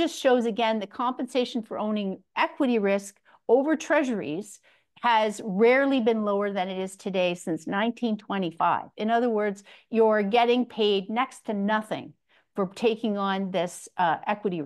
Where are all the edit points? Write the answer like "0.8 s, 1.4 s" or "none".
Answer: none